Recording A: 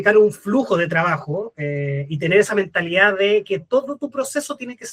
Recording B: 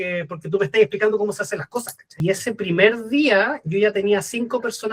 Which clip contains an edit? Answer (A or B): B